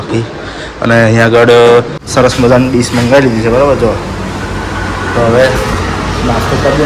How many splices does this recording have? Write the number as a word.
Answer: one